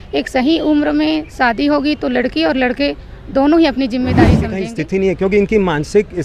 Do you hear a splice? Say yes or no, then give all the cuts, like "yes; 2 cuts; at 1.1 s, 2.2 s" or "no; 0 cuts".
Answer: yes; 1 cut; at 4.5 s